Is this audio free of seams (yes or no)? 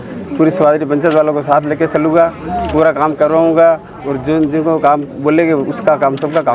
yes